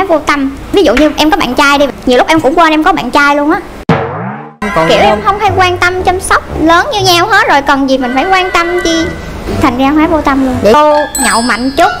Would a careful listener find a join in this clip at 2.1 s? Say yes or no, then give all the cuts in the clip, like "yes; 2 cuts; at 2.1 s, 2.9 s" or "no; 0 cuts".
no; 2 cuts; at 4.7 s, 10.7 s